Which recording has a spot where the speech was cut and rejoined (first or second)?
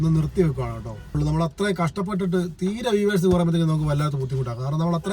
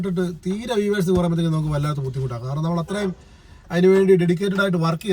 first